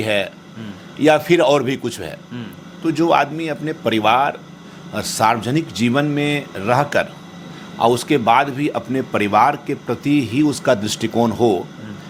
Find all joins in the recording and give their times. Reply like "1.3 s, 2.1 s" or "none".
none